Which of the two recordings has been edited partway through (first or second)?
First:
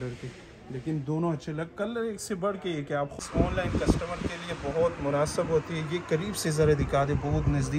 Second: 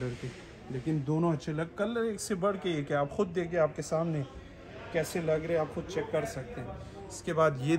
first